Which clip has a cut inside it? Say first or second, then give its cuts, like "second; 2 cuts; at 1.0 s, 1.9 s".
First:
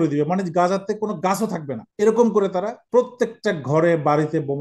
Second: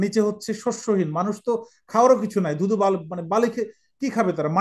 first; 2 cuts; at 1.8 s, 2.8 s